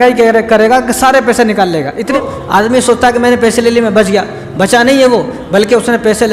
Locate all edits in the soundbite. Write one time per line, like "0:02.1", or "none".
0:02.2

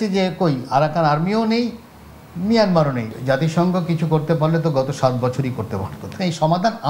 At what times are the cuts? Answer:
0:03.1
0:06.2

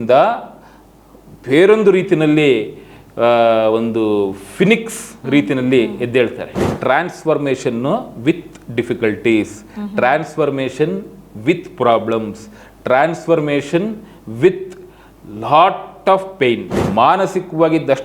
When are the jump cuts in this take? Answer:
0:06.7
0:16.8

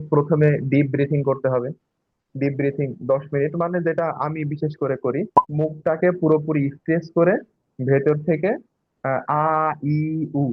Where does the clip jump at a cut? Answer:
0:05.4

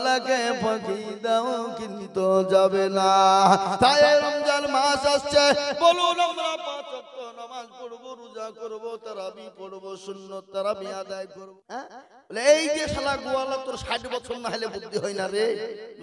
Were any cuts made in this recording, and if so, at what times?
0:11.2

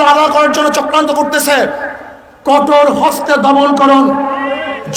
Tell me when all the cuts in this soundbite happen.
none

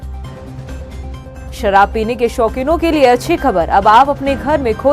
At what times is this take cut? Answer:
0:01.1

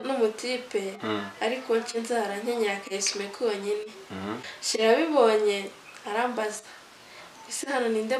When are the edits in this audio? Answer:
0:04.5

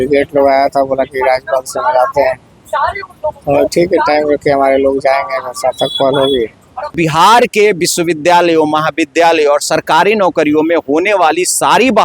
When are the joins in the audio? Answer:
0:07.0

